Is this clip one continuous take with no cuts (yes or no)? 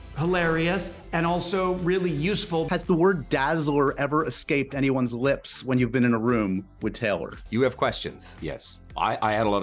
yes